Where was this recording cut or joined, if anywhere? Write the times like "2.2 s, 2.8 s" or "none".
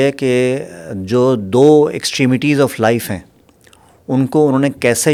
none